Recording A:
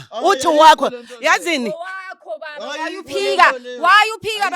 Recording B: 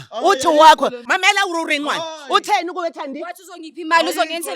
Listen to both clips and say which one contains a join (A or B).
B